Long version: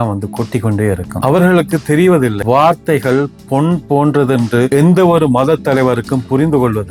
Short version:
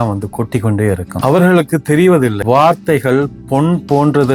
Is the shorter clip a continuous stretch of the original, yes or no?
yes